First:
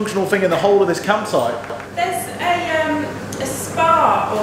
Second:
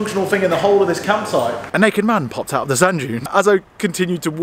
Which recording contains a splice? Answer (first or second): second